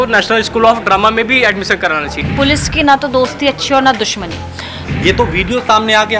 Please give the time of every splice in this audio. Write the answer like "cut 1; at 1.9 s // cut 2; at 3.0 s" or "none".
cut 1; at 2.2 s // cut 2; at 4.9 s